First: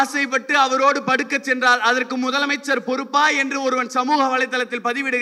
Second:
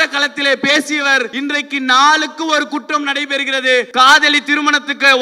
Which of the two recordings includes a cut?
second; 2 cuts; at 1.3 s, 3.9 s

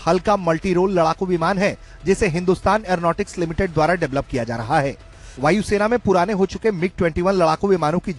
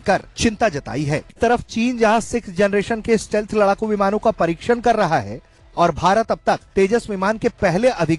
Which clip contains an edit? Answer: second; 1 cut; at 1.3 s

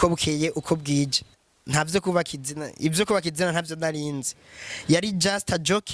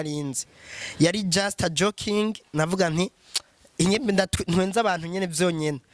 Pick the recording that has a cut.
first; 1 cut; at 1.3 s

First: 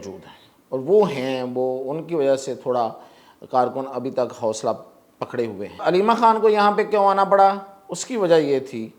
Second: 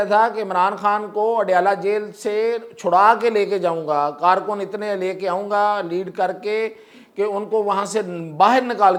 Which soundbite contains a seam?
first; 1 cut; at 5.8 s

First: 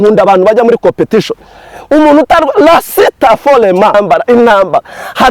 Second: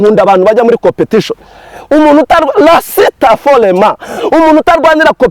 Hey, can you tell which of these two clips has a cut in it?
first; 1 cut; at 3.9 s

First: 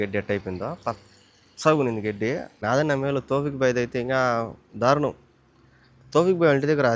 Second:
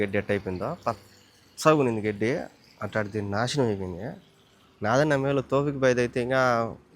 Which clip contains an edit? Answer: first; 1 cut; at 2.5 s

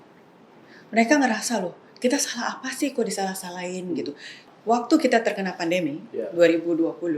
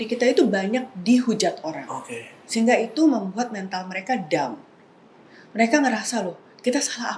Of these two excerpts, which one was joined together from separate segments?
first; 1 cut; at 4.4 s

